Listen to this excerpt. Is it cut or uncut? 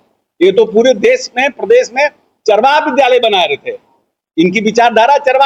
uncut